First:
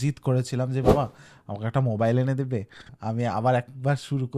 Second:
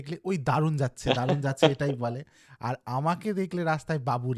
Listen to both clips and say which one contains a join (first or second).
first